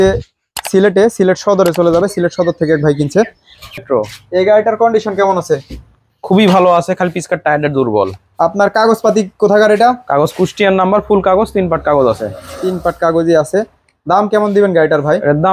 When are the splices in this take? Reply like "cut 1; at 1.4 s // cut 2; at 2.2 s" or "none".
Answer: cut 1; at 3.8 s